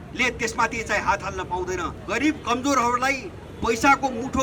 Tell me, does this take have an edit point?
yes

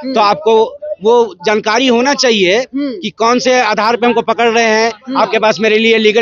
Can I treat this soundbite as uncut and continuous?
yes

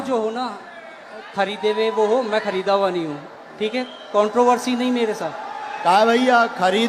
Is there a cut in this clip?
no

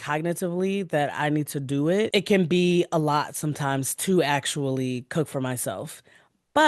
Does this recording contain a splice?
yes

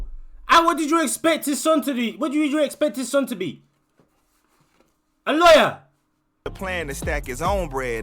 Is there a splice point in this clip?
yes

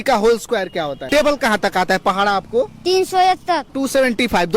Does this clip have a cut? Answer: yes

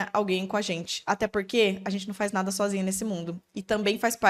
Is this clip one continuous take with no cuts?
yes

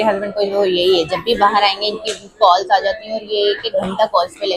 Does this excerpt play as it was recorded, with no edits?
yes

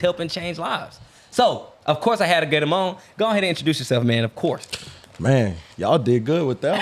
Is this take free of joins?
yes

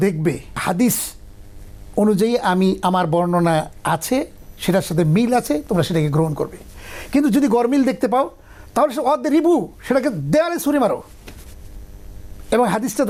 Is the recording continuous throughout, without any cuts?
yes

